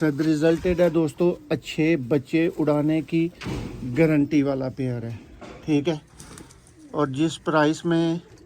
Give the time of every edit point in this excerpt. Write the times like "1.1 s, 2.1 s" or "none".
none

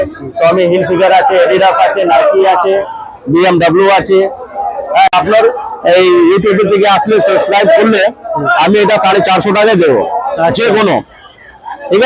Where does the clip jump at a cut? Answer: 5.1 s

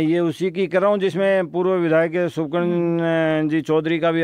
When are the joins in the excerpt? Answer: none

